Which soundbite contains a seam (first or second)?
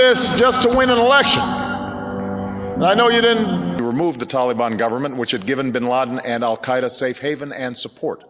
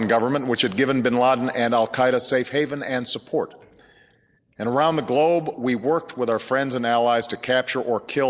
first